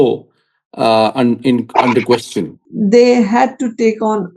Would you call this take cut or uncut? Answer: cut